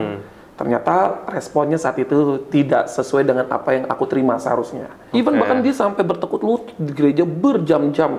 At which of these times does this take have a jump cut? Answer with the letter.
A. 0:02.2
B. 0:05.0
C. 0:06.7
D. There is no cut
B